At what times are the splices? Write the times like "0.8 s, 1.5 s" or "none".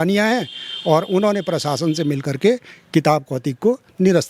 none